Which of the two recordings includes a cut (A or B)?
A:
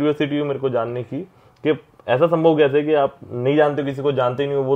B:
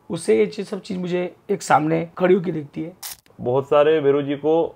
B